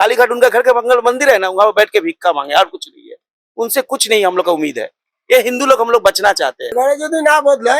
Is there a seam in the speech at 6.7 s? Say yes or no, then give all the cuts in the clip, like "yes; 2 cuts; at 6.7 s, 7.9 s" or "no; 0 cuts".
yes; 1 cut; at 6.7 s